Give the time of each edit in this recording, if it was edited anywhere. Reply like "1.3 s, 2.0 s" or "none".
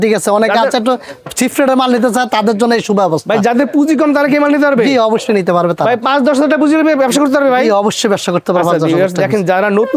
none